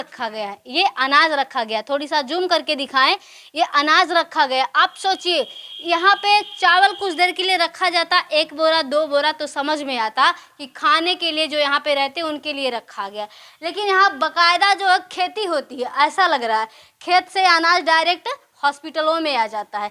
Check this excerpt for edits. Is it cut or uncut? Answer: uncut